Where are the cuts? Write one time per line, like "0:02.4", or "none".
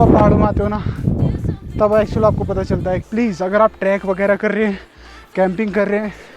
0:03.0